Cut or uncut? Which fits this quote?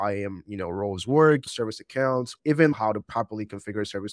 cut